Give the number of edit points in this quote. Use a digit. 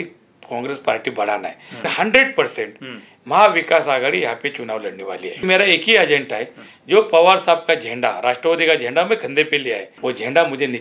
3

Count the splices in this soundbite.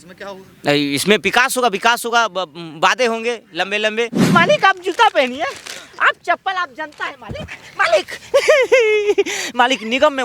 1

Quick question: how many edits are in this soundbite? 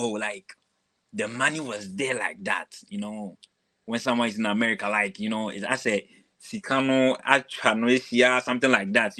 0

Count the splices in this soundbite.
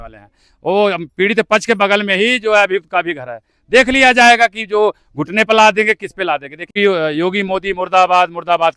1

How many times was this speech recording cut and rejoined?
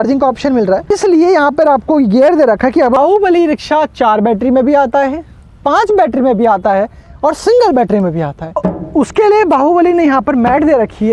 3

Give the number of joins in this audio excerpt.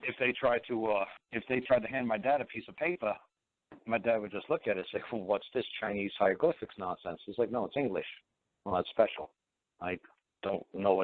1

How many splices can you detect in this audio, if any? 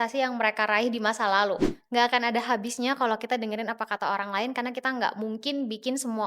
1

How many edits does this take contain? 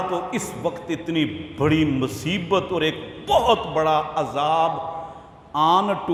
0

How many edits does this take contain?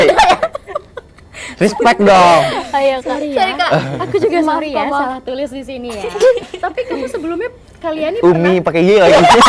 0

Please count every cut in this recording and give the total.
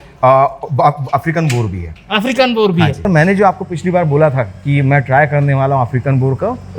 1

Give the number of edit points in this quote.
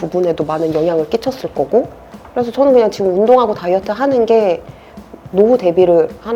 0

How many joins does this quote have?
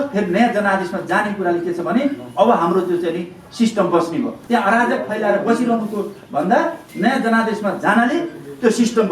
2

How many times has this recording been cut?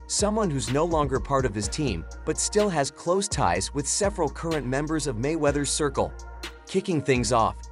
1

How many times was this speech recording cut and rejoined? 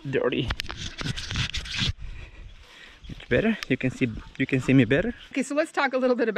1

